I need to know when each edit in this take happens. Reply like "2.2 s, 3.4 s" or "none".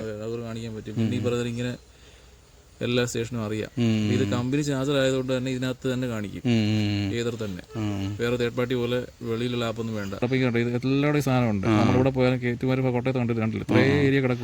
10.2 s